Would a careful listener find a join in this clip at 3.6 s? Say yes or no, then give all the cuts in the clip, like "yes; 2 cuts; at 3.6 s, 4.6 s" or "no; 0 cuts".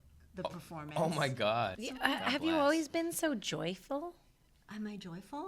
no; 1 cut; at 1.8 s